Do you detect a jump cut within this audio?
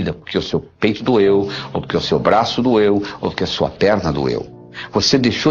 no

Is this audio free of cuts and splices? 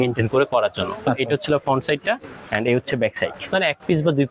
no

